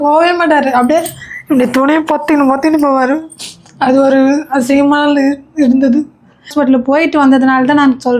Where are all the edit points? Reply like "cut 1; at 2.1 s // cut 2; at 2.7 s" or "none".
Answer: cut 1; at 6.5 s